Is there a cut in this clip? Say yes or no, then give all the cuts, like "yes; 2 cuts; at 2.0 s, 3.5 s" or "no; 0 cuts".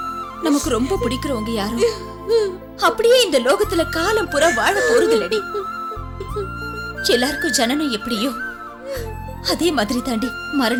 no; 0 cuts